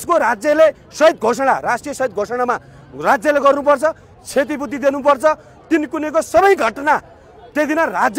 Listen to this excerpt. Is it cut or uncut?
uncut